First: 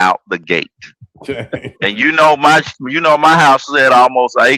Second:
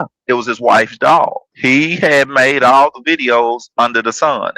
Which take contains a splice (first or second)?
second